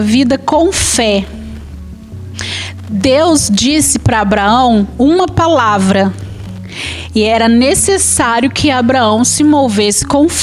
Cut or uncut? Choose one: uncut